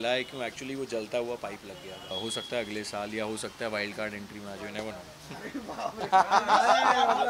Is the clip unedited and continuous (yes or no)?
no